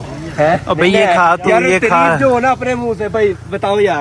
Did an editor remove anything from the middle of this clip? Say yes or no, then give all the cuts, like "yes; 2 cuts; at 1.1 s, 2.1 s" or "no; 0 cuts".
no; 0 cuts